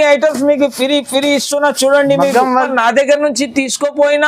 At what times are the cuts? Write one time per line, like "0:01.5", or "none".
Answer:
0:02.7